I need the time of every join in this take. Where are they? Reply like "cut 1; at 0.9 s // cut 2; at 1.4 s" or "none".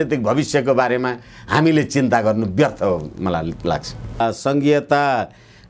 cut 1; at 4.2 s